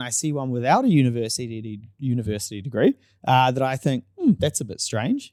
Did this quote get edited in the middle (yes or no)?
no